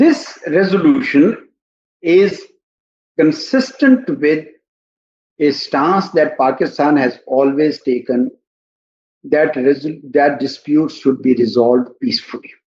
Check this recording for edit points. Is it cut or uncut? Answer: uncut